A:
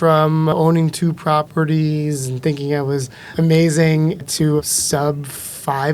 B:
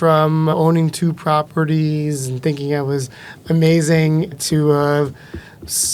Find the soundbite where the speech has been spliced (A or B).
A